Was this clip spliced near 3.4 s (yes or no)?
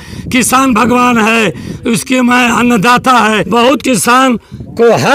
yes